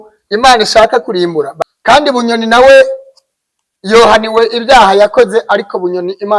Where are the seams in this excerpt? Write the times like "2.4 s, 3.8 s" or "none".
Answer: 1.5 s